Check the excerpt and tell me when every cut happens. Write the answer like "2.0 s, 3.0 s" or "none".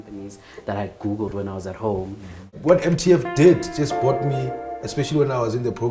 2.5 s

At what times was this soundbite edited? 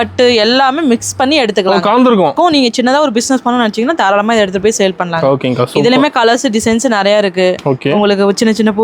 2.3 s

